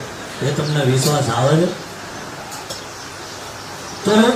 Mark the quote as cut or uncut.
uncut